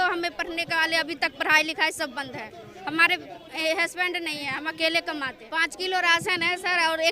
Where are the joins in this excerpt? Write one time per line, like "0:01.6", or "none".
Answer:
0:05.4

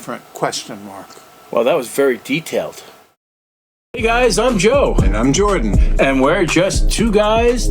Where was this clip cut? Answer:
0:03.5

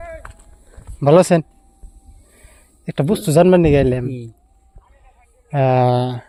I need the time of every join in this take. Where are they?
none

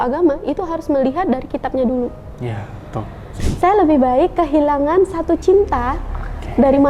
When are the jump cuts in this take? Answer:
0:03.4

